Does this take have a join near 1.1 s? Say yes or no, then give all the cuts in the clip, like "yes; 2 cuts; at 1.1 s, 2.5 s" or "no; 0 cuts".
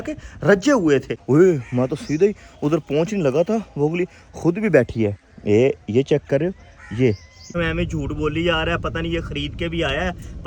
yes; 2 cuts; at 1.1 s, 7.5 s